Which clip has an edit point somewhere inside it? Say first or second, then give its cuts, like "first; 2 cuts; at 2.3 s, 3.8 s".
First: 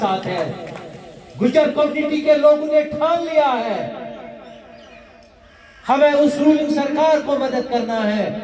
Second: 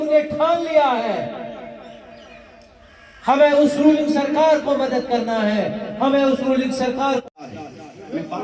second; 1 cut; at 7.4 s